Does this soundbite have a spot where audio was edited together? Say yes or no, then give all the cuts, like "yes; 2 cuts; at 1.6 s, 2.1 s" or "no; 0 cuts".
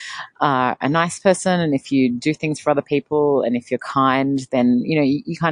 no; 0 cuts